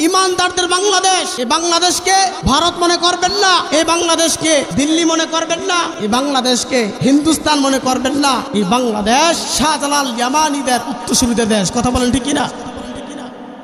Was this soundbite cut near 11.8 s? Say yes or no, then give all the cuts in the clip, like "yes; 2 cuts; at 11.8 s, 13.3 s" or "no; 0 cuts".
no; 8 cuts; at 1.3 s, 2.4 s, 3.7 s, 4.7 s, 5.9 s, 6.9 s, 8.5 s, 9.5 s